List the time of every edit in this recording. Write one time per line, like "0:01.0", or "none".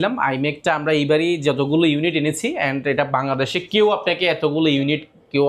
none